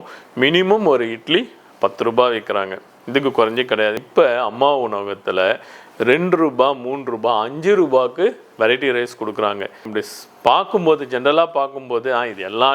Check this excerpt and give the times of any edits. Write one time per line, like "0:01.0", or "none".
0:04.0
0:09.9